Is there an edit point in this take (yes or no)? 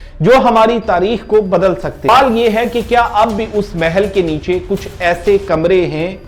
yes